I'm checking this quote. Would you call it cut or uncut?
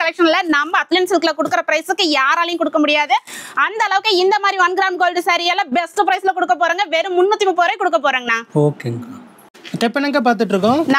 uncut